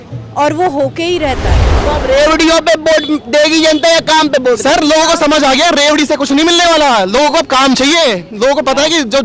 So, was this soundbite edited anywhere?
yes; 1 cut; at 1.8 s

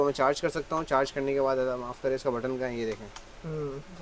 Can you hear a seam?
no; 0 cuts

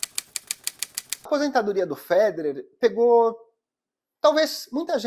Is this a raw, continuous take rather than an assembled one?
no; 1 cut; at 1.2 s

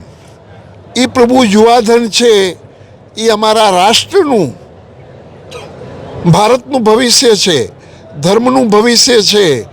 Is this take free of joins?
yes; 0 cuts

